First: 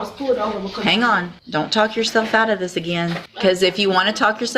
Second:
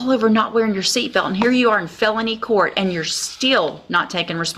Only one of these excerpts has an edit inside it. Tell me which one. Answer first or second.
first